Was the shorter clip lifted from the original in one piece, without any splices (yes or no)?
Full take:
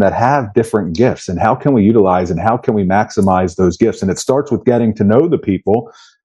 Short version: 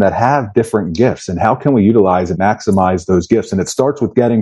no